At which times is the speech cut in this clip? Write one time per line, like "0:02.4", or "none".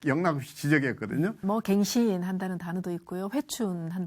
0:01.4